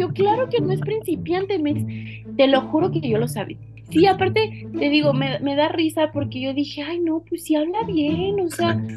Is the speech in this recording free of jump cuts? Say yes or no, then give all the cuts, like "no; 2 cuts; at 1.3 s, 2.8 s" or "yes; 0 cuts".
no; 1 cut; at 3.8 s